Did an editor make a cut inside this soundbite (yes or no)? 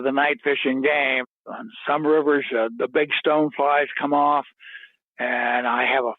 yes